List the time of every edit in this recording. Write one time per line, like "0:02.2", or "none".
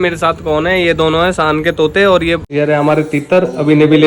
0:02.4